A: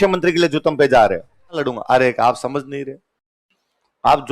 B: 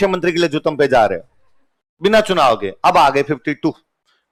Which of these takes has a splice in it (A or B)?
A